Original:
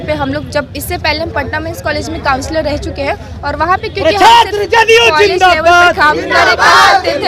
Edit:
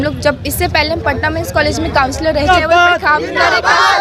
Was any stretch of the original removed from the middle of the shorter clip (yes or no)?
yes